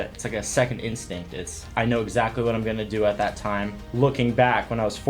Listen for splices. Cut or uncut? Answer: cut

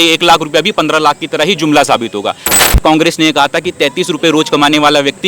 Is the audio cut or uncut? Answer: cut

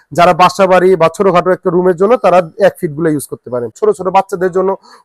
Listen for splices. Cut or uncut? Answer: cut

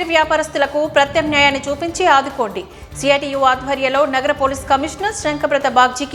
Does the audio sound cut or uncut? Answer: uncut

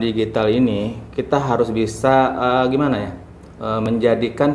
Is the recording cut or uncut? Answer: uncut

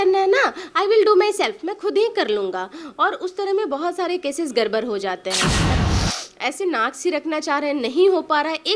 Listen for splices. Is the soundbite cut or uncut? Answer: cut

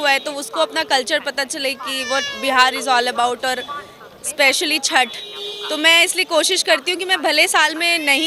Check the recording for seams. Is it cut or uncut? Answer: uncut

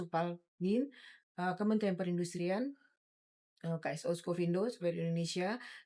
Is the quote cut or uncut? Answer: uncut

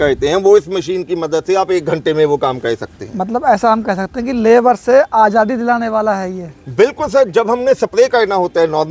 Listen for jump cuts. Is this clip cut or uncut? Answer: uncut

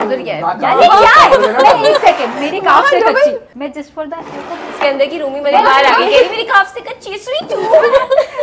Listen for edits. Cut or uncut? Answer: cut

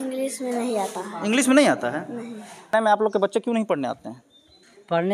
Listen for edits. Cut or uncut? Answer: cut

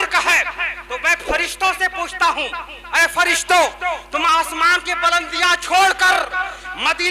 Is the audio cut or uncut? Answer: uncut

